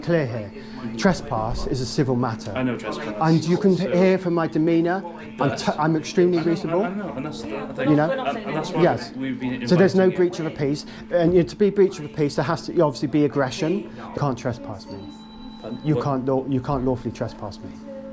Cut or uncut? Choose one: cut